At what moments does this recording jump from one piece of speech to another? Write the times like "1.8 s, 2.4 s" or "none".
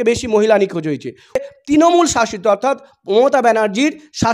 1.5 s